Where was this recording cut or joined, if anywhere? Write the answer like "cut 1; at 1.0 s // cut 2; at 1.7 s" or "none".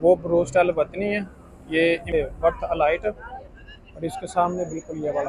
cut 1; at 2.1 s